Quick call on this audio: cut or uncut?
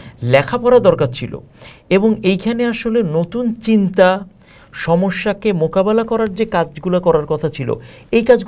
uncut